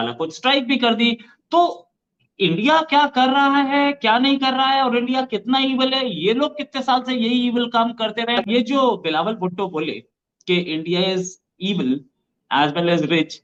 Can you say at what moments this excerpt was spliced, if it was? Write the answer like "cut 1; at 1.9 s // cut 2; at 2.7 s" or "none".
none